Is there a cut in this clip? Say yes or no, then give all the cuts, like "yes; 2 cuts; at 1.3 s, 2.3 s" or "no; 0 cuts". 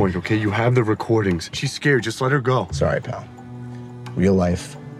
no; 0 cuts